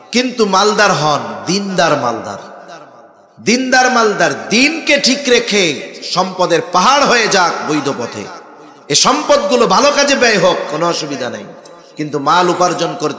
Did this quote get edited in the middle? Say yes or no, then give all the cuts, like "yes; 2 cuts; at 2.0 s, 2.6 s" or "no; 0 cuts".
no; 0 cuts